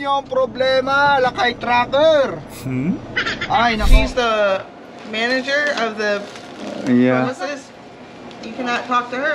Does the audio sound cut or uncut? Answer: cut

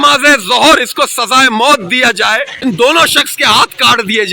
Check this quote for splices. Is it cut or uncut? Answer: cut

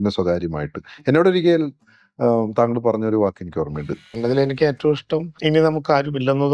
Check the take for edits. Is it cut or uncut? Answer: cut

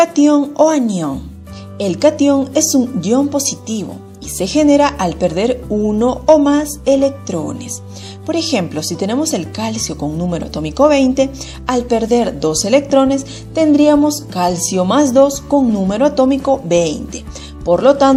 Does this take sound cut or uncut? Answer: uncut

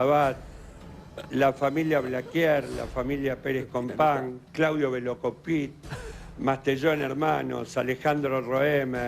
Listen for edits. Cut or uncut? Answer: uncut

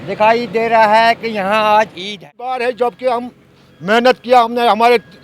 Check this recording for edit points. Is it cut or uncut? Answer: cut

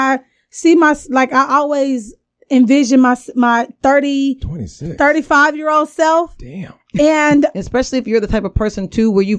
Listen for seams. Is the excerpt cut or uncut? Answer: cut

